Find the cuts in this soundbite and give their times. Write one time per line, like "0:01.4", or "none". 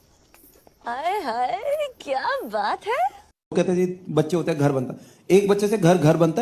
0:03.5